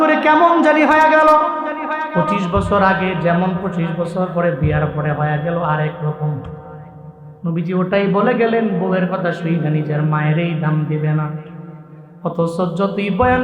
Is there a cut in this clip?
yes; 1 cut; at 2.1 s

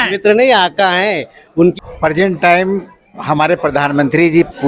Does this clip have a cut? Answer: yes; 1 cut; at 1.8 s

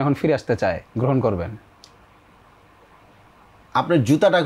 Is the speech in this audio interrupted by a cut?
no; 0 cuts

